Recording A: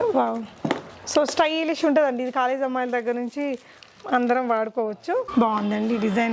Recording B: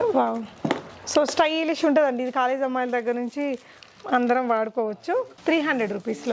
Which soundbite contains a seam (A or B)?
A